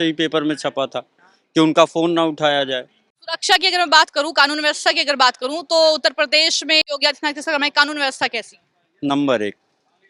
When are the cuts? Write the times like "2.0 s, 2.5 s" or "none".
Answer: none